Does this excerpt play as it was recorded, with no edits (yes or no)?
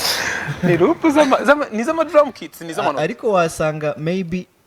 yes